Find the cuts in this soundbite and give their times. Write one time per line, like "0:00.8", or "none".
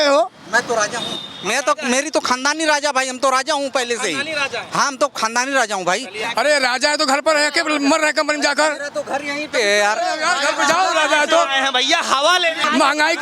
0:06.2